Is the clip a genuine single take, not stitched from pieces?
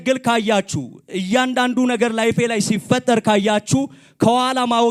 yes; 0 cuts

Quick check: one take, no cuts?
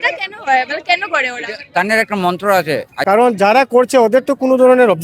no; 1 cut; at 2.9 s

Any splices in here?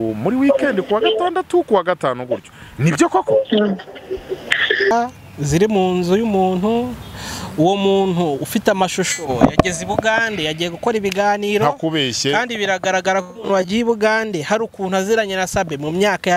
yes; 1 cut; at 4.9 s

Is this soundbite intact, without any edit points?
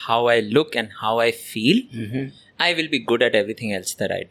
yes; 0 cuts

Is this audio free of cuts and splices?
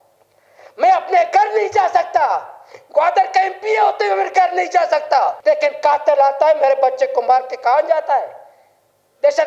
no; 1 cut; at 5.4 s

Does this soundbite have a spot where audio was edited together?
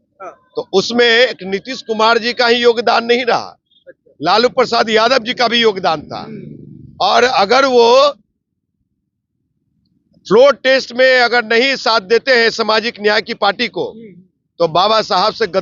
no; 0 cuts

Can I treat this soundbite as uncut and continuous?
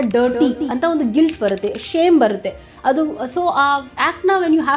yes; 0 cuts

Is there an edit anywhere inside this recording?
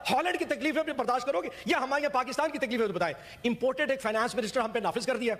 no; 0 cuts

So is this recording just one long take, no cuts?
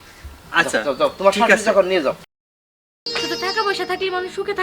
no; 1 cut; at 2.7 s

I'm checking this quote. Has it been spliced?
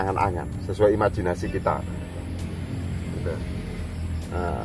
no; 0 cuts

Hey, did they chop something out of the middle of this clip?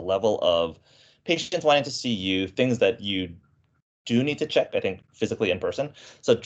no; 0 cuts

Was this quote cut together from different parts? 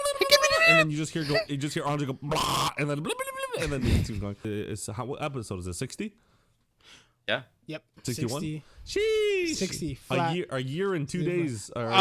yes; 1 cut; at 4.4 s

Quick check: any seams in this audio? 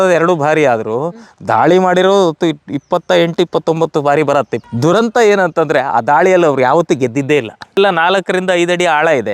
yes; 2 cuts; at 4.6 s, 7.8 s

